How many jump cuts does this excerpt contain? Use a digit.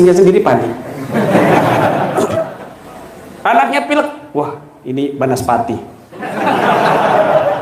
1